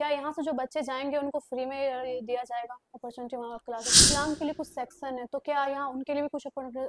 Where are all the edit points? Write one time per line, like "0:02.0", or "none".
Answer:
0:04.1